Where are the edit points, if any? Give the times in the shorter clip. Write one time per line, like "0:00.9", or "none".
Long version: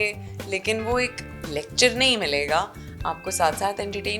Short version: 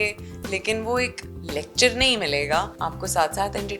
0:02.7